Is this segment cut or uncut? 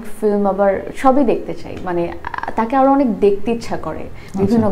uncut